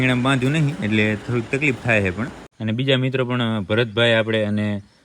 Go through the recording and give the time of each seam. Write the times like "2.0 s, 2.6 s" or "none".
2.4 s